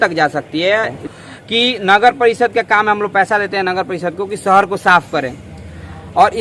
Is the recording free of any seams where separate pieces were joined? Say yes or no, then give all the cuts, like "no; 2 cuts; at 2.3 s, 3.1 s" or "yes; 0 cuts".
no; 1 cut; at 1.0 s